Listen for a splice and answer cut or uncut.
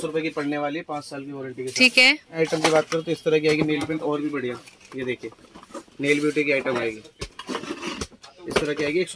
cut